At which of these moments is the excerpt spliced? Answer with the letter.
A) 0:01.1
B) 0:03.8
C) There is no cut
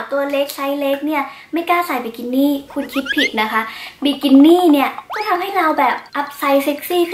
C